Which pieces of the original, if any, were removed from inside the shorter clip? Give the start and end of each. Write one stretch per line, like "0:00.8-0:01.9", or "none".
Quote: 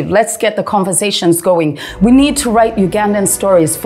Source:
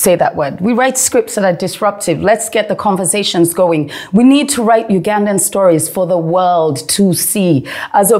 none